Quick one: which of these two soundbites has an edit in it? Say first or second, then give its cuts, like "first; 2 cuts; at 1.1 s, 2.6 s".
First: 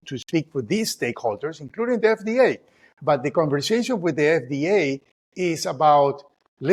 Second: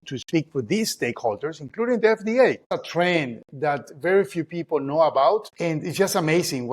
second; 2 cuts; at 2.8 s, 5.5 s